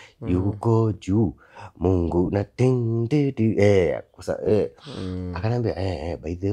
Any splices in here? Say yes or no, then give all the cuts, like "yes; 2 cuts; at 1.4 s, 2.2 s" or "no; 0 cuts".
no; 0 cuts